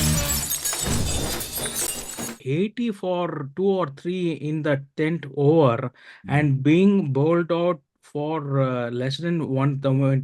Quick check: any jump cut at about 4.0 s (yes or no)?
no